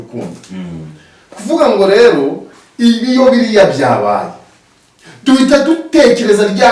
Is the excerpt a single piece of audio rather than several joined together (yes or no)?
yes